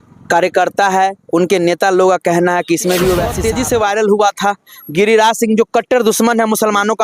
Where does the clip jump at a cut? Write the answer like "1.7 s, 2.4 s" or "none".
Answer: 3.3 s